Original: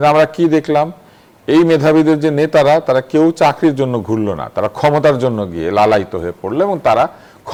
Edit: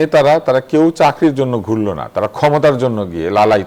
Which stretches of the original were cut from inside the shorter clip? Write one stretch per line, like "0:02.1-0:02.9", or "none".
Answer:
none